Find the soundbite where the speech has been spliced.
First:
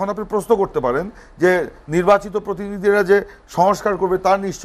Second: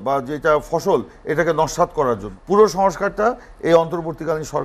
second; 1 cut; at 2.3 s

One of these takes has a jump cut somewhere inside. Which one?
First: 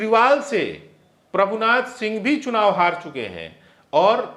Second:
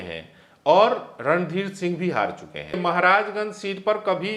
second; 1 cut; at 2.8 s

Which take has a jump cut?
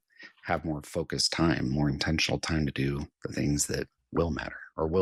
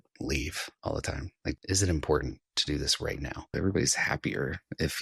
second; 2 cuts; at 1.1 s, 3.5 s

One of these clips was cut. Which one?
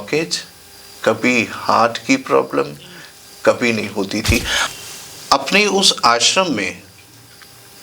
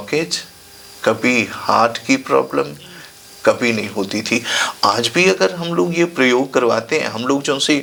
first; 1 cut; at 4.7 s

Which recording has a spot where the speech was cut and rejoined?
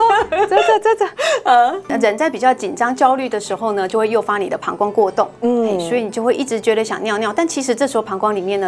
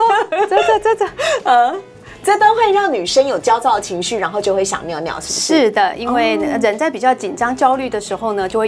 first; 1 cut; at 1.9 s

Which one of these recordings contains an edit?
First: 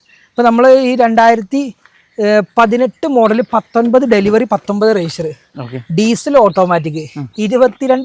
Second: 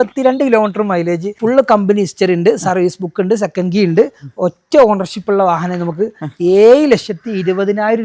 second; 1 cut; at 1.4 s

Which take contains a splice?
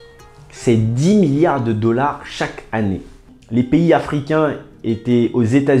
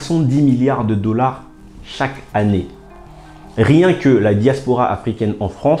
first; 1 cut; at 3.3 s

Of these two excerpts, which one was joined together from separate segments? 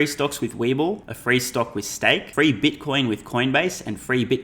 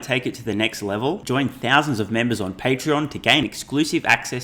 first; 2 cuts; at 1.1 s, 2.3 s

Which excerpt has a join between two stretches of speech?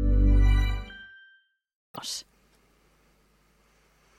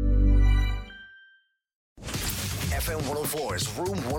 second; 1 cut; at 2.0 s

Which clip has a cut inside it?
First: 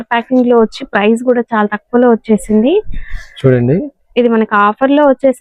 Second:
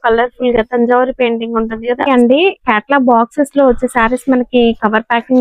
second; 1 cut; at 2.1 s

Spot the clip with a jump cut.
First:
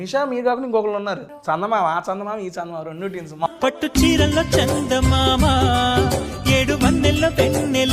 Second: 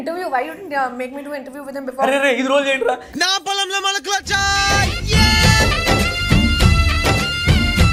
first; 2 cuts; at 1.3 s, 3.5 s

